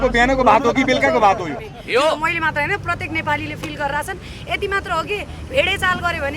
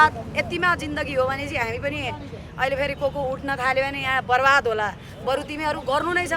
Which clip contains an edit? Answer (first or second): first